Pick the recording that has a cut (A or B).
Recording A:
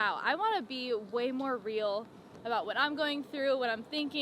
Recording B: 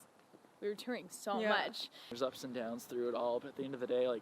B